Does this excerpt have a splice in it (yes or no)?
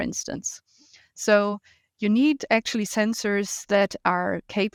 no